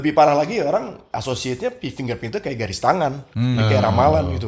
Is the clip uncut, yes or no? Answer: no